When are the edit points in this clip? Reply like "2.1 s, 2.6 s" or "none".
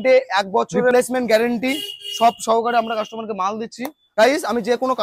0.9 s, 4.0 s